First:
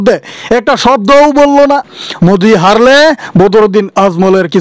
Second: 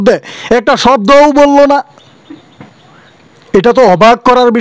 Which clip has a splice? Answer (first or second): first